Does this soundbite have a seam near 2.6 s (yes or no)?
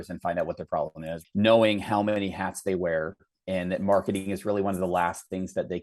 no